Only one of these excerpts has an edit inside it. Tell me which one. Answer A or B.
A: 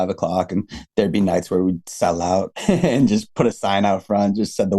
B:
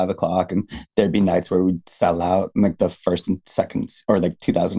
A